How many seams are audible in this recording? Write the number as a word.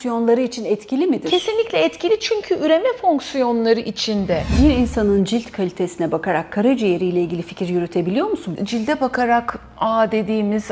two